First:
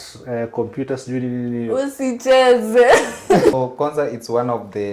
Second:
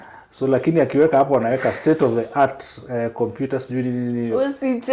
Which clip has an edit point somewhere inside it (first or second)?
first